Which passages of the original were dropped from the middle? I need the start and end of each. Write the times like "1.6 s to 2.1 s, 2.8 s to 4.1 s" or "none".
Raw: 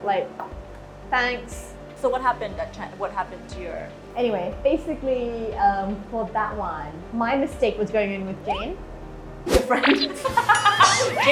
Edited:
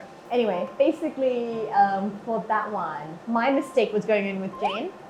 none